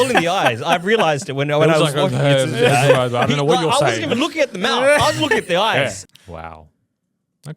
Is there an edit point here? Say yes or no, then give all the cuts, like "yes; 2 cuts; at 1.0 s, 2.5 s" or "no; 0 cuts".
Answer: yes; 1 cut; at 6.0 s